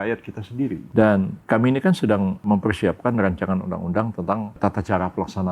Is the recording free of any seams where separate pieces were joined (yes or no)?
no